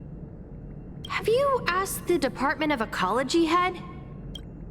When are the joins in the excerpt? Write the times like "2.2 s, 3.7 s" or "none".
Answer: 1.1 s, 3.8 s